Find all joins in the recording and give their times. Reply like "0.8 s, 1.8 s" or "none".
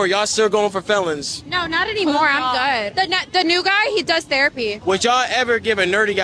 none

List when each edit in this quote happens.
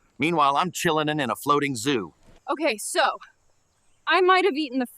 2.3 s

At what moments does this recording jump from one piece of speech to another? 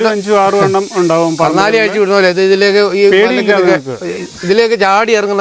none

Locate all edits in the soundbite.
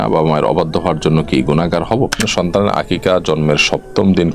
2.2 s

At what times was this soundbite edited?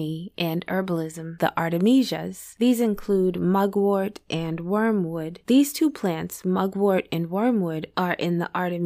1.3 s

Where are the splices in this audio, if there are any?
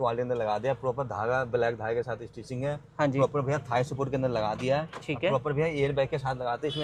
none

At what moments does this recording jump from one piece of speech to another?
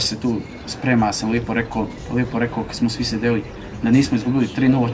none

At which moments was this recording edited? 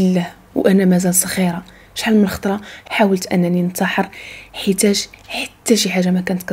none

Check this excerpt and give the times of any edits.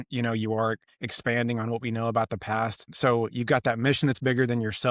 2.9 s

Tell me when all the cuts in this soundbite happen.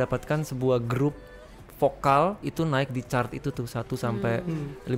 2.5 s

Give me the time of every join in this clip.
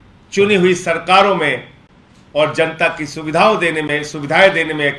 none

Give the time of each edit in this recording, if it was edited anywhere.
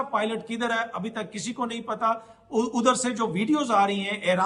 none

